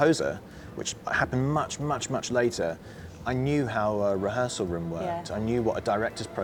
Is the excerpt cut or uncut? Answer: uncut